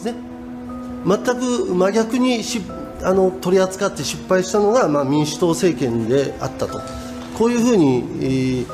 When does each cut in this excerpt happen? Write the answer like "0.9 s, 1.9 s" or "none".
4.6 s